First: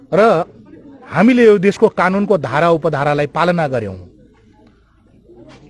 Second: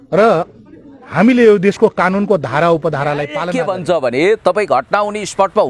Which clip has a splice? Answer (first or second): second